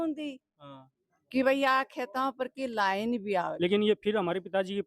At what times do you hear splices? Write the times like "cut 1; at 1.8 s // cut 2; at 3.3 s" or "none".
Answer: cut 1; at 3.5 s